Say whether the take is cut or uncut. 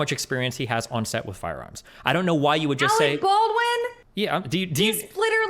cut